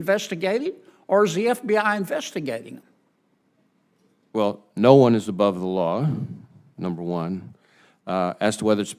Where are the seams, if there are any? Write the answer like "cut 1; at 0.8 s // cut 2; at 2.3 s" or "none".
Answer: none